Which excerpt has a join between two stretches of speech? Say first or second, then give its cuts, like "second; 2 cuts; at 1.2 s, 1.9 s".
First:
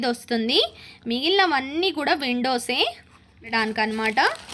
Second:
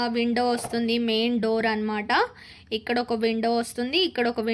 first; 1 cut; at 3.5 s